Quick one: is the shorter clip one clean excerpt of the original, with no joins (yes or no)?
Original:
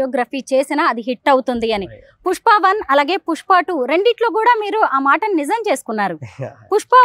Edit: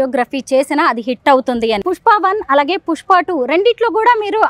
no